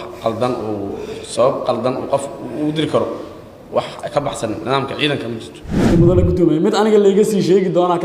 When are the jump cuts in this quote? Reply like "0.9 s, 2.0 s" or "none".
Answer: 5.9 s